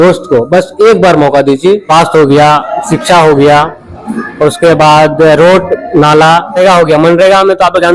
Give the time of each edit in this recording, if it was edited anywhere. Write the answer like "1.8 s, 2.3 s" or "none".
1.9 s, 6.6 s